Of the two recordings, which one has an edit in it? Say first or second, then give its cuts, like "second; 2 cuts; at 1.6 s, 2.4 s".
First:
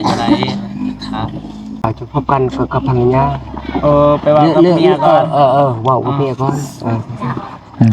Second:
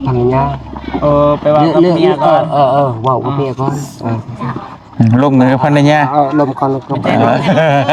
first; 1 cut; at 1.8 s